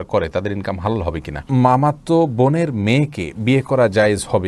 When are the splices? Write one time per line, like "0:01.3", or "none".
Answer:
0:01.8